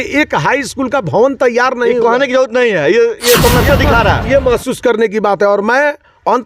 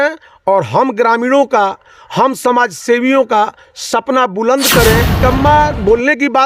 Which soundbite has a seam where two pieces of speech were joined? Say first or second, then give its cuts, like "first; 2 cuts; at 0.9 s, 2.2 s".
second; 1 cut; at 5.2 s